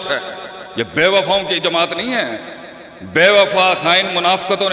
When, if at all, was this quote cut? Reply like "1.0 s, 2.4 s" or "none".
none